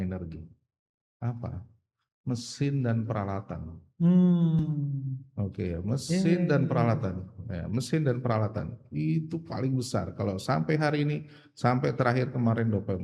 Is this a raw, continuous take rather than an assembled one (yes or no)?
yes